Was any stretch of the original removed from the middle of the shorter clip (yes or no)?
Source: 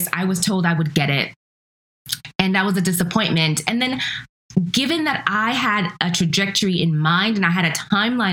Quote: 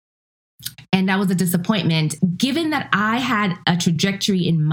yes